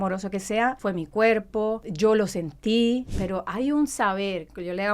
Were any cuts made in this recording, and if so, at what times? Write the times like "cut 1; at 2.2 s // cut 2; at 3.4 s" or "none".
cut 1; at 0.8 s // cut 2; at 1.9 s // cut 3; at 3.1 s